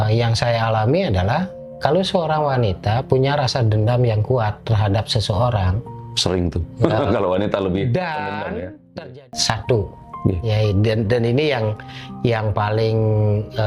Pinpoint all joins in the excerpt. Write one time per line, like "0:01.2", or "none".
0:09.1